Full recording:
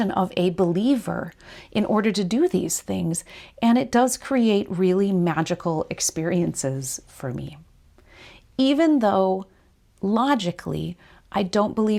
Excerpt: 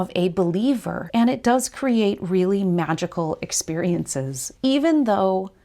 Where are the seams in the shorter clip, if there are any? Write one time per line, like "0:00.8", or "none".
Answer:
0:01.0
0:04.4